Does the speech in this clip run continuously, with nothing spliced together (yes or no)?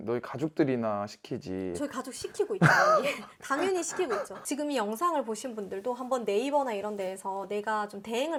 yes